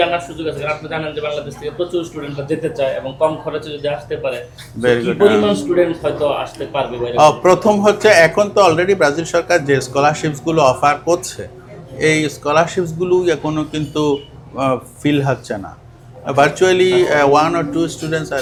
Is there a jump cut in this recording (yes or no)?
no